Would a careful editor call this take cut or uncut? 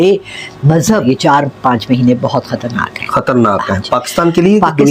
cut